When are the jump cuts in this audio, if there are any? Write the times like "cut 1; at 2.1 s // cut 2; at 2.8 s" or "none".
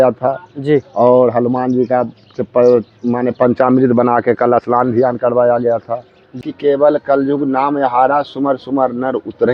cut 1; at 6.5 s